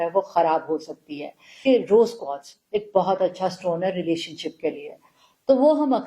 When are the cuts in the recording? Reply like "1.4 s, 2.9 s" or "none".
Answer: 1.4 s